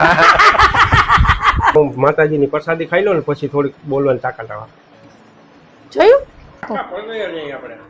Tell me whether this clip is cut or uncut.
cut